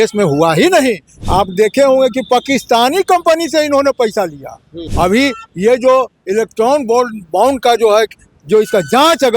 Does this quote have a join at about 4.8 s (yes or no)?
yes